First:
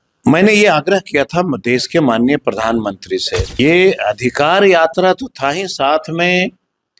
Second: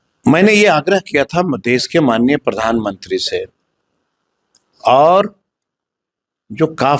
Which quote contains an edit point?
first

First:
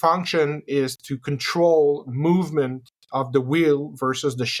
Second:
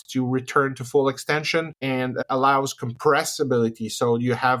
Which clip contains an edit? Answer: second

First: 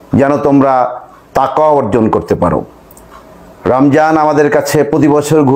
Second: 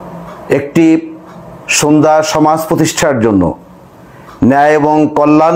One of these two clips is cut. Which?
first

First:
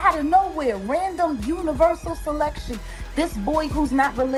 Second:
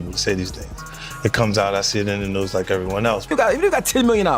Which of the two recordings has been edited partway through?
second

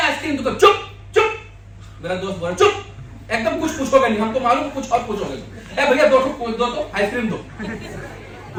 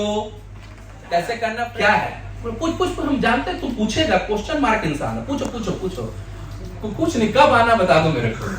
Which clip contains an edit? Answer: second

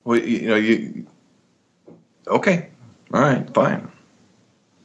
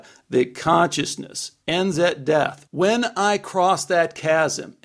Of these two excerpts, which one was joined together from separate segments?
second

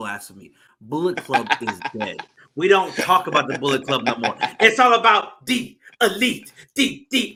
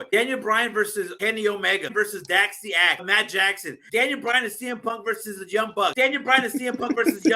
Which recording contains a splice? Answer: second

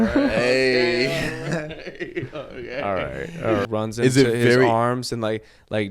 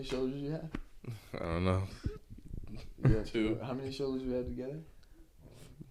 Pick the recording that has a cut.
first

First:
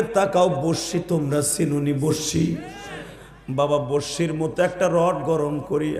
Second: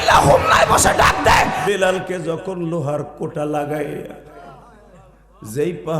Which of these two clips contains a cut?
second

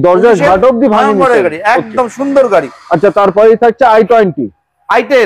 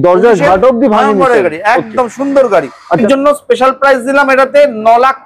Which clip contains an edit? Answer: second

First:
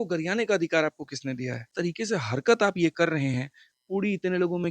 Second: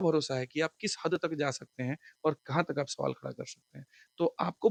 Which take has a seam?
first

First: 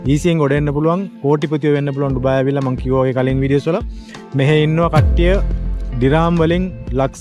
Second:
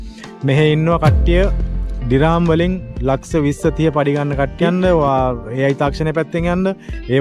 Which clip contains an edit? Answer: second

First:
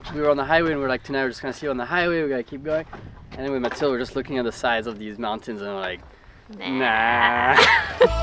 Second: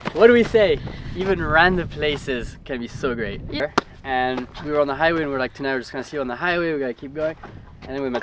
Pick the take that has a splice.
second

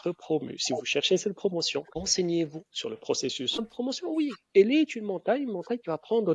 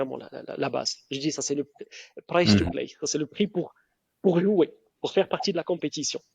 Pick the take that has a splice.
first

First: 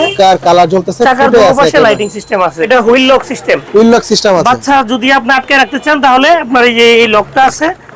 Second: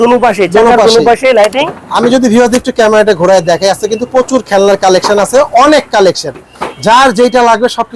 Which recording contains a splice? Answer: first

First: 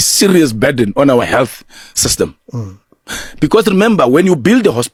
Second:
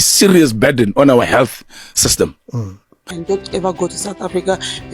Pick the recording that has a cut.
second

